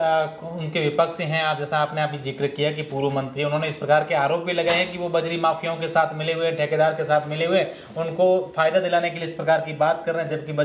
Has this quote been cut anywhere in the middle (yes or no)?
no